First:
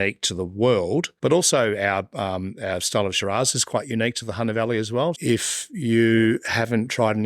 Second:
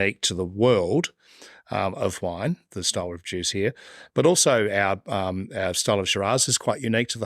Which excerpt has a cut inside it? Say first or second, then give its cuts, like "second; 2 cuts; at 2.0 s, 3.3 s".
first; 2 cuts; at 1.1 s, 5.2 s